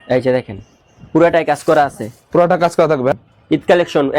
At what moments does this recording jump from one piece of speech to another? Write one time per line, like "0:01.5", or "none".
0:03.1